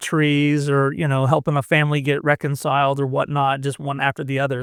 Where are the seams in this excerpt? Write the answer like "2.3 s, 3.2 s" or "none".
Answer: none